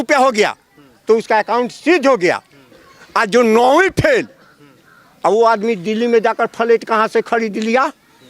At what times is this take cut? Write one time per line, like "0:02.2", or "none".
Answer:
none